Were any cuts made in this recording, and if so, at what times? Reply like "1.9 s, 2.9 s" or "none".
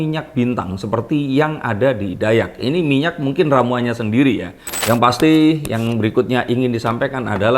4.7 s